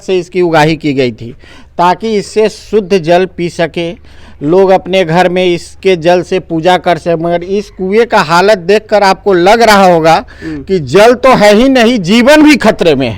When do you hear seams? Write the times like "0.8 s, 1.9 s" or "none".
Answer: none